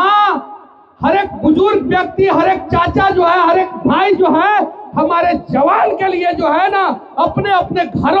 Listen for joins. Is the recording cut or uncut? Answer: uncut